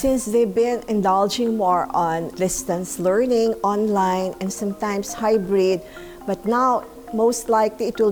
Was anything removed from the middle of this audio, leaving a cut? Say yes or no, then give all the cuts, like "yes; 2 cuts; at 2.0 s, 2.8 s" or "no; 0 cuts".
no; 0 cuts